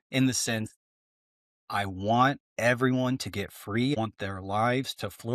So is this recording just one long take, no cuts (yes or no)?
no